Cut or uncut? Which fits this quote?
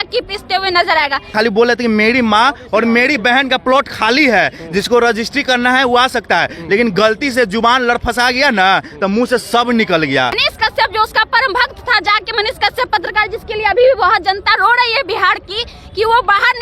cut